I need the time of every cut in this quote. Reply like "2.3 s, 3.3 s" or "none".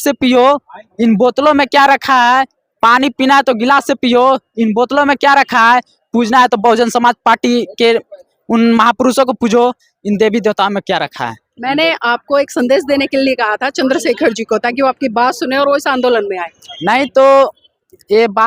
none